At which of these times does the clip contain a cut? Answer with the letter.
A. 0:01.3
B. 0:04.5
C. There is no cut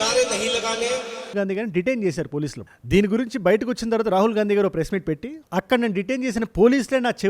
A